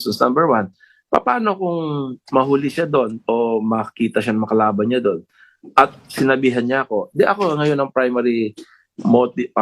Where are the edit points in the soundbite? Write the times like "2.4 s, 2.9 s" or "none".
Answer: none